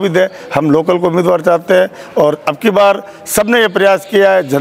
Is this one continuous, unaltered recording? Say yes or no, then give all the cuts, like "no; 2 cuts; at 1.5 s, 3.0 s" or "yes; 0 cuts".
yes; 0 cuts